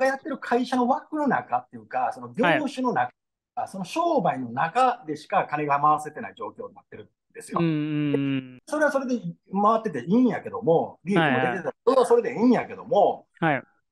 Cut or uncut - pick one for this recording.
cut